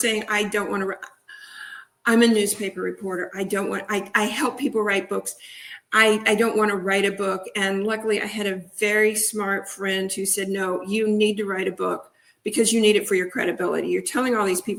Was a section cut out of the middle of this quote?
no; 0 cuts

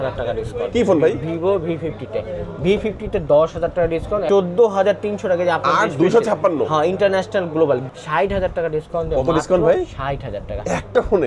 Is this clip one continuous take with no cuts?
no; 2 cuts; at 4.3 s, 7.9 s

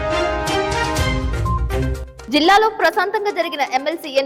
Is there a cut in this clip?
yes; 1 cut; at 2.0 s

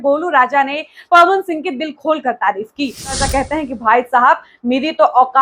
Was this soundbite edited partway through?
yes; 1 cut; at 3.1 s

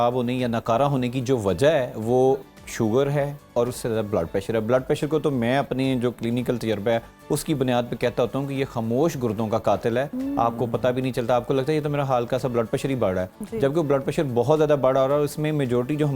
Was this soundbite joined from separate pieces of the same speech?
no; 0 cuts

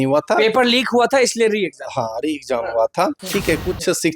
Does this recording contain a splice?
yes; 1 cut; at 3.3 s

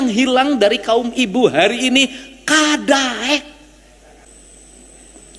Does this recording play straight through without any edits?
no; 1 cut; at 4.3 s

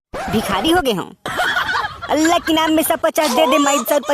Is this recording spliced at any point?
yes; 1 cut; at 1.9 s

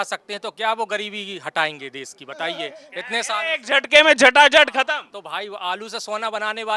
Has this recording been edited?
no; 0 cuts

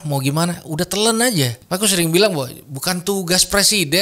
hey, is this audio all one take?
no; 1 cut; at 1.6 s

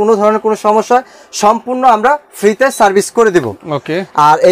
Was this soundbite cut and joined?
no; 0 cuts

